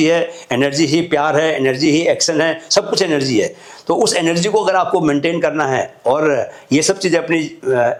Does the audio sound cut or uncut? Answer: uncut